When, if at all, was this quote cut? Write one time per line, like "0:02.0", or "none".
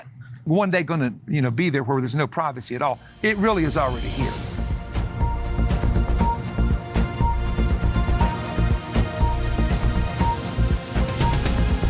0:04.0